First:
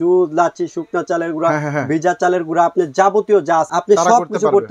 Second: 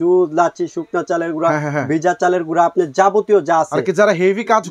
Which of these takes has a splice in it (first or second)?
first